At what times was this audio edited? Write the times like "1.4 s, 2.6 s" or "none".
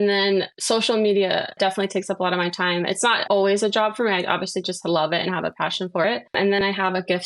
3.2 s